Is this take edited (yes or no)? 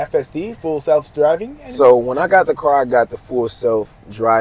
no